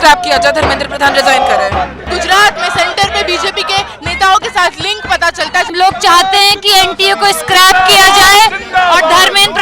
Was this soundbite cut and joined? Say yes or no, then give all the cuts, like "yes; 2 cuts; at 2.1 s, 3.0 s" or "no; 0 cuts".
yes; 2 cuts; at 2.0 s, 5.7 s